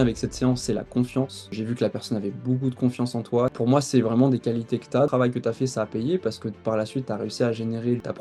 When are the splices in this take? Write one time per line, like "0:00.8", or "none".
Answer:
0:03.5
0:05.1